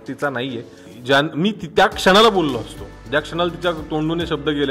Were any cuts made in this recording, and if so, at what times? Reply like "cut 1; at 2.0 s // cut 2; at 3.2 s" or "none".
cut 1; at 0.9 s

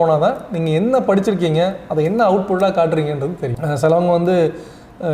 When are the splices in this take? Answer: cut 1; at 3.5 s

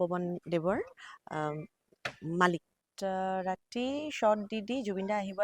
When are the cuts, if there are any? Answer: cut 1; at 2.9 s

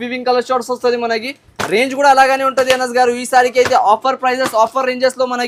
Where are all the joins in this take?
none

